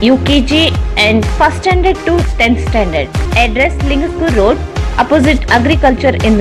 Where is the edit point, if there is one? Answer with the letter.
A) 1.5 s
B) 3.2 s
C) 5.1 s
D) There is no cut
B